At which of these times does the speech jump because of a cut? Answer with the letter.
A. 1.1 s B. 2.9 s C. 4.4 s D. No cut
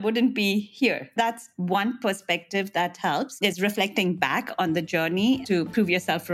A